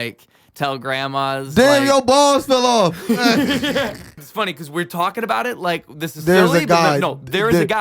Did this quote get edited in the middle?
yes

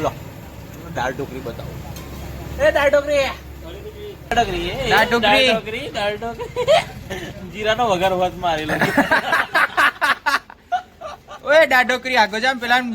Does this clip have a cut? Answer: yes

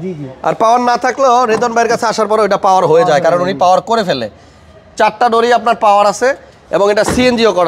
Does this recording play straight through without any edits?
yes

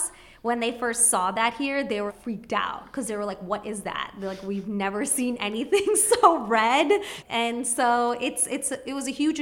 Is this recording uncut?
no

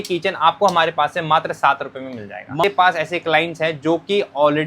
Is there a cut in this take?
yes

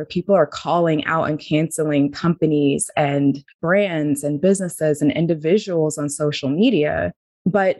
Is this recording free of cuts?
no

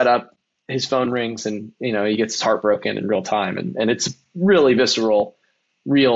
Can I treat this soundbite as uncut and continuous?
yes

